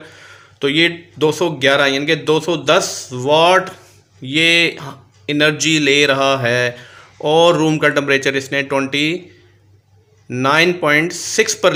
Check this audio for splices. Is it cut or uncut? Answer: uncut